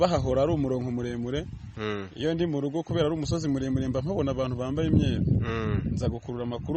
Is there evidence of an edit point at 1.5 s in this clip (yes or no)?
no